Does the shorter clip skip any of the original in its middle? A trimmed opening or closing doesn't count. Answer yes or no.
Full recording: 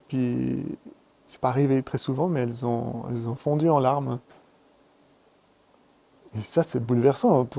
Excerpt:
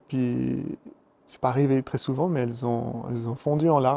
no